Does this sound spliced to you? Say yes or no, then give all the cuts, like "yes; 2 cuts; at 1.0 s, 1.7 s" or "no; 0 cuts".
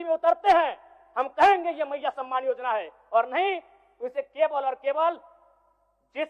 no; 0 cuts